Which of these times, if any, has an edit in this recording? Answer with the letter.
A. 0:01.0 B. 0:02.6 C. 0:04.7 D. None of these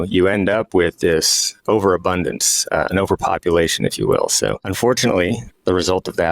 C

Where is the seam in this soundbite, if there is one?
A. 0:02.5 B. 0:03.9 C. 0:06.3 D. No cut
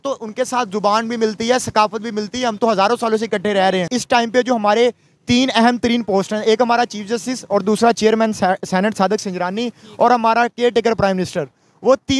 B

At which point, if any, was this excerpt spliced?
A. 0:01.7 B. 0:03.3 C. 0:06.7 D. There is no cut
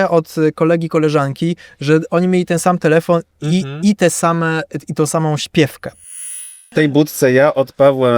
C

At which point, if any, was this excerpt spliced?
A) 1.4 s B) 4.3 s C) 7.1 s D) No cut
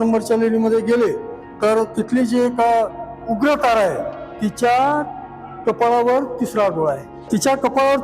C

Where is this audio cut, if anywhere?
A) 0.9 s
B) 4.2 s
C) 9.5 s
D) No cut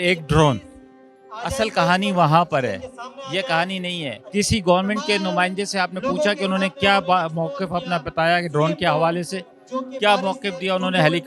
B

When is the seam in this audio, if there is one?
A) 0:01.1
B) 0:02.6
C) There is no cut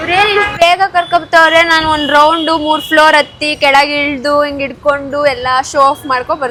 C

